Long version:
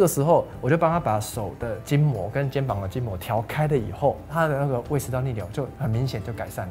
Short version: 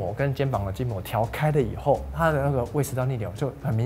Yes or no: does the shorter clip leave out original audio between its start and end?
no